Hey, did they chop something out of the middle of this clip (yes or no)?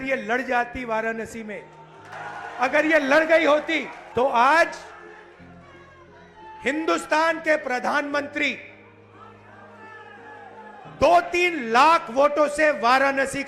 yes